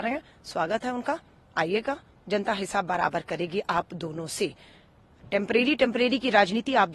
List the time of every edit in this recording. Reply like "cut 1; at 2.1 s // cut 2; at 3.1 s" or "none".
none